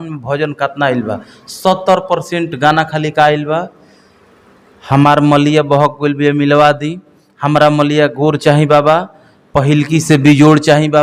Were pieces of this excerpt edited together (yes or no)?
no